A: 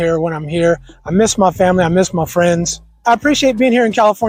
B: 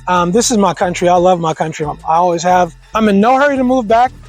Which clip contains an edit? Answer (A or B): B